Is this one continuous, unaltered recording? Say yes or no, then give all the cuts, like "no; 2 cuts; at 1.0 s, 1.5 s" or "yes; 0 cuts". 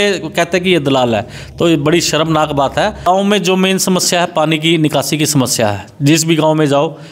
no; 1 cut; at 3.1 s